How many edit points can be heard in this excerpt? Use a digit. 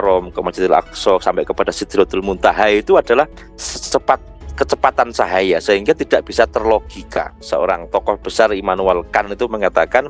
1